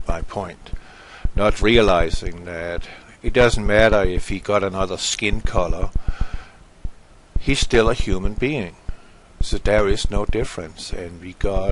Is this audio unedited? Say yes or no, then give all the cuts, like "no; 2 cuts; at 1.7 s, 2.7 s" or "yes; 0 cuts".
yes; 0 cuts